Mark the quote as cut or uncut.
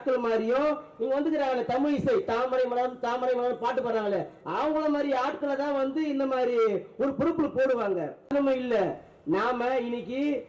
cut